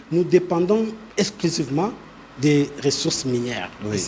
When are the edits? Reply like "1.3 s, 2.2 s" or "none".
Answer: 1.0 s